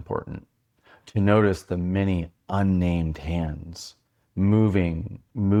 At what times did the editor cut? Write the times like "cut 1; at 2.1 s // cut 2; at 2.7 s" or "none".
none